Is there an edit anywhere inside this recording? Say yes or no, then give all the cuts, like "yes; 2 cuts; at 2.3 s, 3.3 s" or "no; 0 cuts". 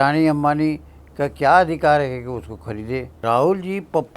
yes; 1 cut; at 3.2 s